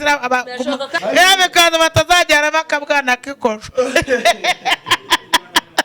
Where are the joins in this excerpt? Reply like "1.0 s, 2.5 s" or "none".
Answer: 0.9 s